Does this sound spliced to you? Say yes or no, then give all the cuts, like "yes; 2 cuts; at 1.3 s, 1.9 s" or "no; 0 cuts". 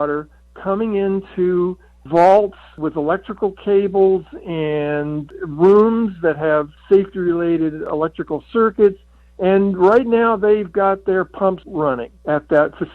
yes; 3 cuts; at 6.7 s, 7.8 s, 11.8 s